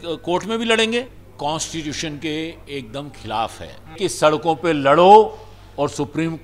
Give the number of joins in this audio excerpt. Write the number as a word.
two